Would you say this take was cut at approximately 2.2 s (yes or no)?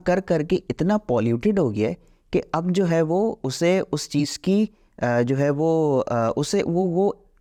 no